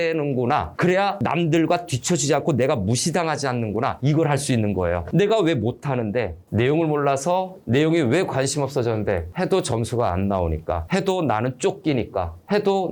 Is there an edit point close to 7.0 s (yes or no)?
no